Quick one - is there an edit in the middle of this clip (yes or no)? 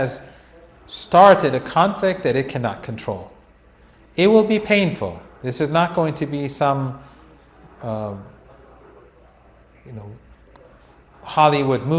no